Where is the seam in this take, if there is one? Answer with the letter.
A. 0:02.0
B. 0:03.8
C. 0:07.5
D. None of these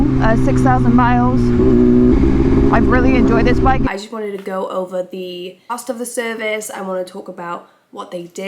B